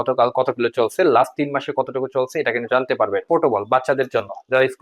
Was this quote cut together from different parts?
yes; 1 cut; at 3.2 s

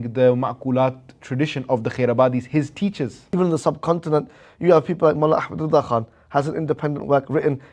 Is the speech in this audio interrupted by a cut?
yes; 1 cut; at 3.2 s

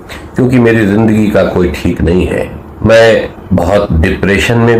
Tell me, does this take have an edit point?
yes; 2 cuts; at 2.6 s, 3.4 s

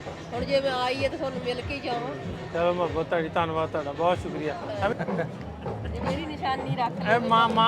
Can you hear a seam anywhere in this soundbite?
yes; 1 cut; at 4.9 s

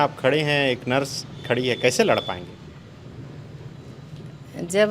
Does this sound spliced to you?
no; 0 cuts

